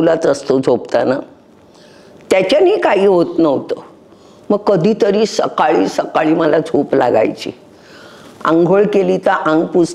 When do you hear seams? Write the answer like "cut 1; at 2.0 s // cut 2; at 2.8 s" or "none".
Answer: none